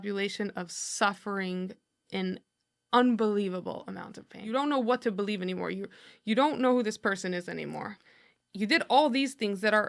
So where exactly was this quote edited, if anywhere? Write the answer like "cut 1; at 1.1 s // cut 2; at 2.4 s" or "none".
cut 1; at 4.4 s